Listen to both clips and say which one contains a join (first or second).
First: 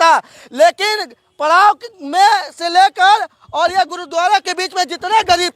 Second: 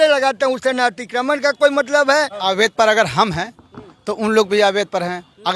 second